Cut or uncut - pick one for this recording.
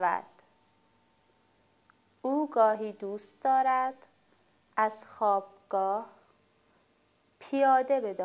cut